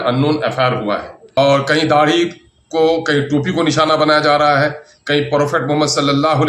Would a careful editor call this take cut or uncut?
cut